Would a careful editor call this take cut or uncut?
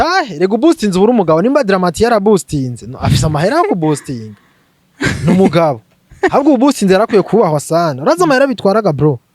uncut